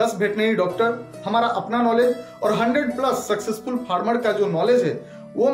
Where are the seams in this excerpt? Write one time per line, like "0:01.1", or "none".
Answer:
none